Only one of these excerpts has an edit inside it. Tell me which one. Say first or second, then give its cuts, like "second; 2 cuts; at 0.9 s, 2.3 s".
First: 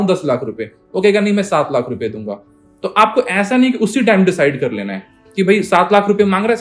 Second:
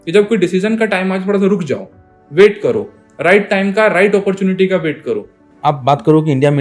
second; 1 cut; at 5.4 s